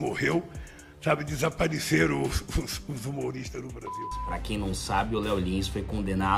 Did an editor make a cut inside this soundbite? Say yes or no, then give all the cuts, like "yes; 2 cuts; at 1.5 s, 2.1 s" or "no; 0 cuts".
yes; 1 cut; at 4.1 s